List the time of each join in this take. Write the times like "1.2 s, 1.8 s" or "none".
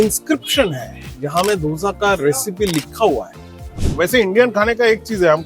3.8 s